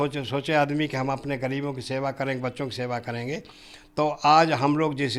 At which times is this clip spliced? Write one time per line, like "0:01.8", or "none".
none